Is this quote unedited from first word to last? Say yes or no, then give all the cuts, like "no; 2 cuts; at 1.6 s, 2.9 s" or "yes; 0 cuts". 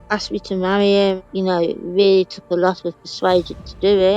no; 1 cut; at 1.2 s